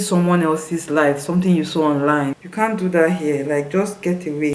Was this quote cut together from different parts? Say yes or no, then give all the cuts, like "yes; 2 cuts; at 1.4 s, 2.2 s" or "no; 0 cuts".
yes; 1 cut; at 2.4 s